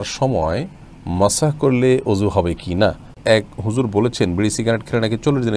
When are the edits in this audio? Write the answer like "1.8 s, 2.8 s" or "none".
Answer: 3.1 s